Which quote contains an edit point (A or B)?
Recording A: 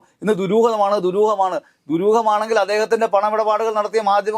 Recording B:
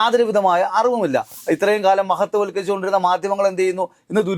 B